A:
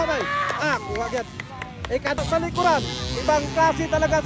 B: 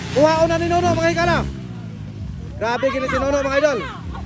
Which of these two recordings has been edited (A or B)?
A